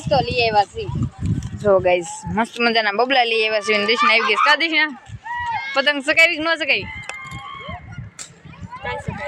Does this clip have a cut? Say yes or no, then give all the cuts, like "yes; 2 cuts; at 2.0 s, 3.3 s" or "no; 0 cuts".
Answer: no; 0 cuts